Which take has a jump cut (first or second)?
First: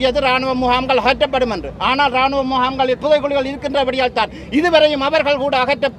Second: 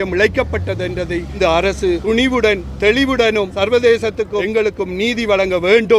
second